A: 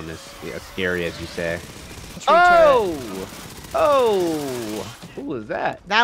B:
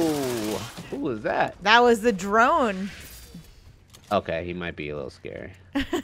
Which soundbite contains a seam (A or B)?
A